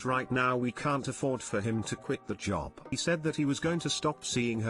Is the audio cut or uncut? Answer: cut